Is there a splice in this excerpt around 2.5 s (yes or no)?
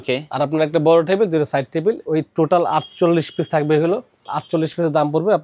no